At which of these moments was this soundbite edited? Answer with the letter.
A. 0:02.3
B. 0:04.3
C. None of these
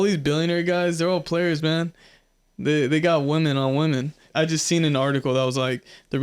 B